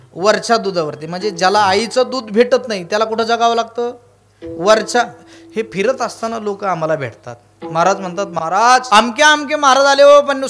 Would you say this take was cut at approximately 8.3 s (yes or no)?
yes